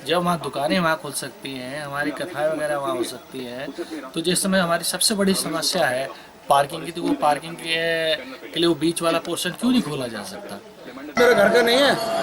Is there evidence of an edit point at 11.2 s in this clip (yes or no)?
yes